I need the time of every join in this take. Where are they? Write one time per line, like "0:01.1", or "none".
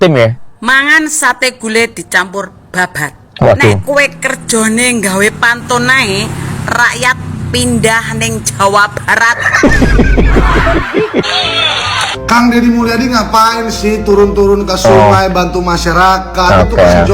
0:11.1